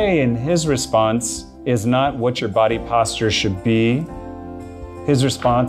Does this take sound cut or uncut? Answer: uncut